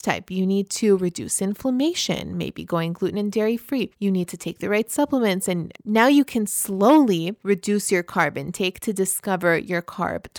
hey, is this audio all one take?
no; 3 cuts; at 3.9 s, 5.7 s, 7.3 s

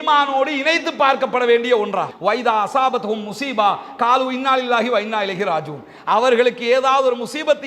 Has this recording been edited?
yes; 1 cut; at 2.1 s

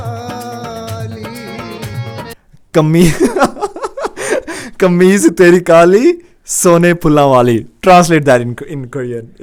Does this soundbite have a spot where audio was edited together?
no; 0 cuts

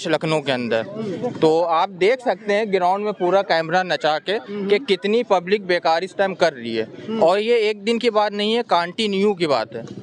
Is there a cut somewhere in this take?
no; 0 cuts

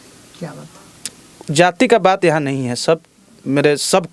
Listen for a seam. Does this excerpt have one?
no; 0 cuts

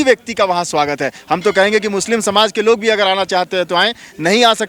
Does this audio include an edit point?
no; 0 cuts

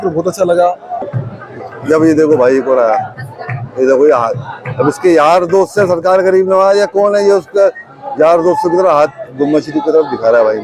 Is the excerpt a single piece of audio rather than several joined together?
no; 1 cut; at 1.0 s

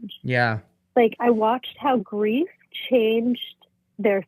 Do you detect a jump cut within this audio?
yes; 1 cut; at 2.1 s

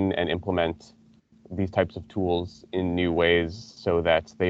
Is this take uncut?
yes; 0 cuts

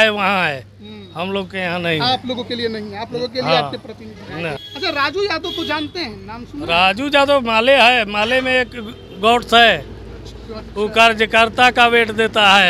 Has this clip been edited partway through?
yes; 1 cut; at 4.6 s

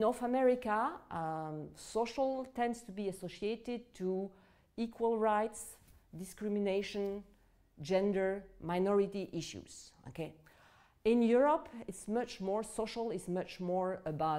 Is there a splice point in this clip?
no; 0 cuts

